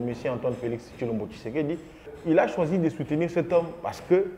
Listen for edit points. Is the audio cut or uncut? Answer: cut